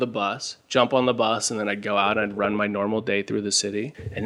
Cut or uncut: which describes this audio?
uncut